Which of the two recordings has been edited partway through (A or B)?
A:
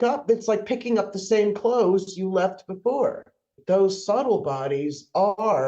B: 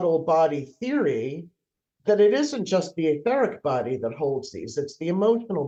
A